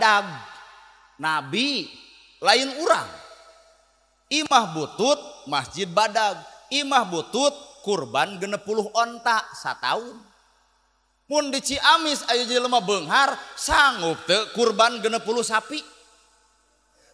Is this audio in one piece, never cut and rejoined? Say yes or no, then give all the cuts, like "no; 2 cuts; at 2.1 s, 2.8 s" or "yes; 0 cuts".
yes; 0 cuts